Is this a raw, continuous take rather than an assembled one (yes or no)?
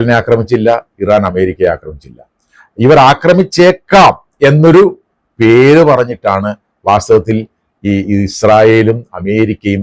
yes